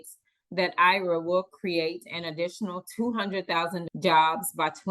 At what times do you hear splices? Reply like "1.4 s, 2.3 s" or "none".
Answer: 3.8 s